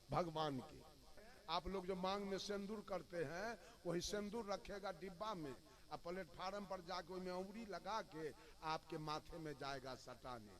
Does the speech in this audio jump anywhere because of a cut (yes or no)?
yes